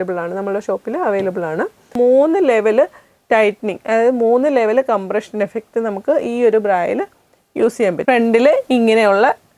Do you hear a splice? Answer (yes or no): yes